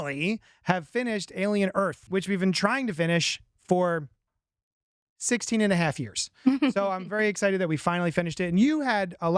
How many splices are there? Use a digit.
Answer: 1